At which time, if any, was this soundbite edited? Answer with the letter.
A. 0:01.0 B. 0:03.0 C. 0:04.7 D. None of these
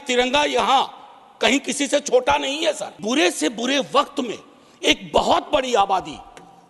B